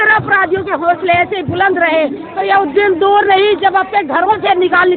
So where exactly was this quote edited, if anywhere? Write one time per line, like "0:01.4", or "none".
none